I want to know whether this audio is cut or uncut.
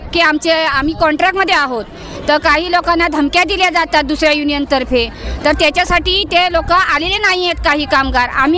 uncut